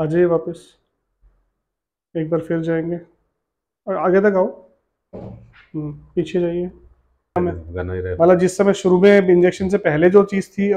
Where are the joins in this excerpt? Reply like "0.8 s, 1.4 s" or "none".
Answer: 7.3 s